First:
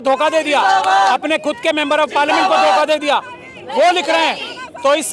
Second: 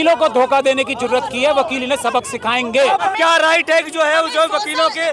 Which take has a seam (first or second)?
second